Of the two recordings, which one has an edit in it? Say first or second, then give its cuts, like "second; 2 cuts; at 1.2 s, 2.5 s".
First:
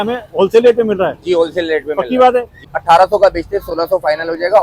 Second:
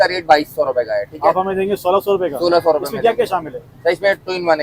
first; 1 cut; at 2.7 s